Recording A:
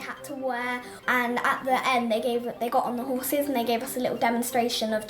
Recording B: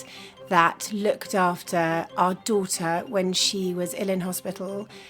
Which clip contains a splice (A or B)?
A